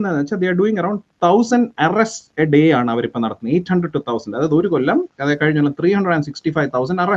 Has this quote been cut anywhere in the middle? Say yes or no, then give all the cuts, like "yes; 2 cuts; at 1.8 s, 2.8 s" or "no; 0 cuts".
no; 0 cuts